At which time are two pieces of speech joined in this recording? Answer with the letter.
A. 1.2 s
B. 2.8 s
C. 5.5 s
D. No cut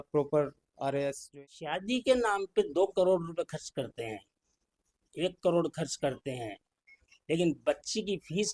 A